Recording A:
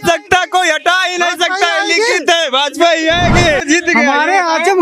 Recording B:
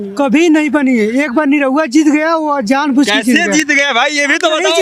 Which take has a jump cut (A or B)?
A